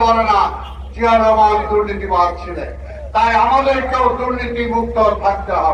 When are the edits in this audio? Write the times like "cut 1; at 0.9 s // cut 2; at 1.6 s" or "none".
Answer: none